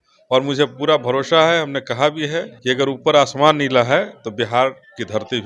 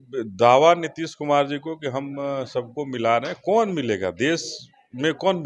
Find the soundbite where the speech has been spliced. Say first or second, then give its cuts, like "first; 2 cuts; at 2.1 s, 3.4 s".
first; 1 cut; at 2.5 s